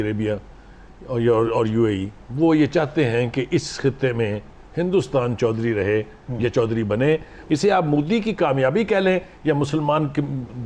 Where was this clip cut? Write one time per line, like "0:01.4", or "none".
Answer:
0:07.3